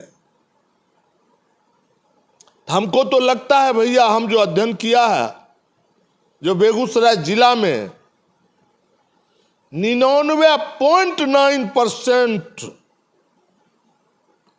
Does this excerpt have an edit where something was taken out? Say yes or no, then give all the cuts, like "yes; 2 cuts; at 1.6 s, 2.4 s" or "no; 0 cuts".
no; 0 cuts